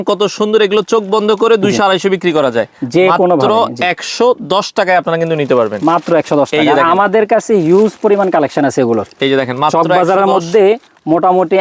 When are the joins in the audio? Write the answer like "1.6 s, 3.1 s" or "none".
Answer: none